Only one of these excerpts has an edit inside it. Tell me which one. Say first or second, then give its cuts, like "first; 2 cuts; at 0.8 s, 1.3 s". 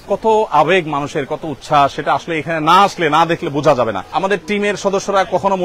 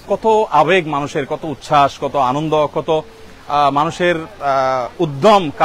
first; 2 cuts; at 2.0 s, 4.0 s